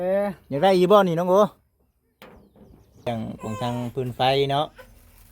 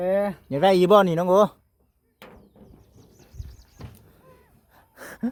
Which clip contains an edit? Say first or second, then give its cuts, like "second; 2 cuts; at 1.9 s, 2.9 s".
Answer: first; 1 cut; at 3.1 s